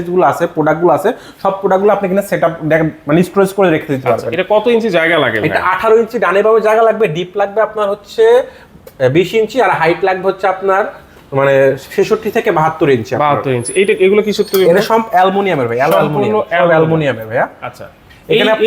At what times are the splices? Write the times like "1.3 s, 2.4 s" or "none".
none